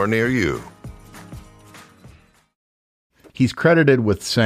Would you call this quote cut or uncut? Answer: cut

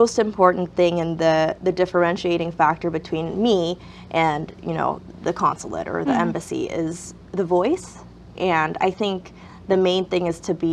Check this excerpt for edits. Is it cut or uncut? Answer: uncut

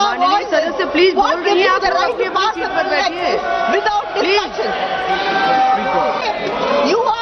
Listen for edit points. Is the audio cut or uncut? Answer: cut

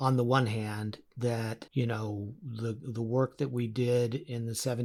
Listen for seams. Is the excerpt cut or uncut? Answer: uncut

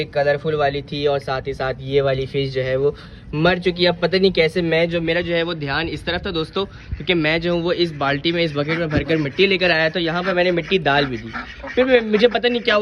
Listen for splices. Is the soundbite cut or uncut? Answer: uncut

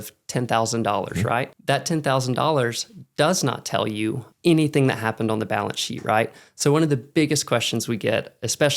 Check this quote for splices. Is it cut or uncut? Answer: cut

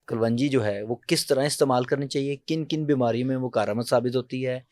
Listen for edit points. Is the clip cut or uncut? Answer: uncut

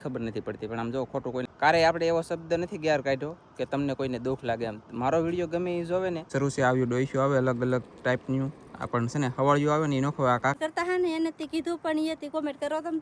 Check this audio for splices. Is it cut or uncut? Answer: cut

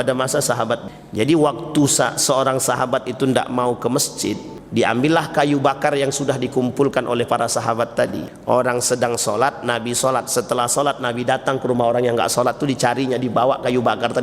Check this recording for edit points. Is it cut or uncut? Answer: cut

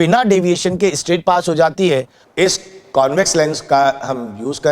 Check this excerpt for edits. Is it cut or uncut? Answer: cut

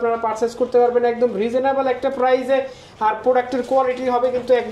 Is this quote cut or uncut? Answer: uncut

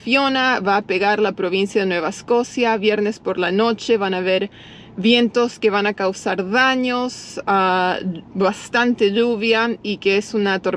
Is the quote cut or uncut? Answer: uncut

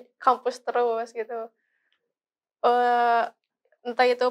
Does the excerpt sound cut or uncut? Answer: uncut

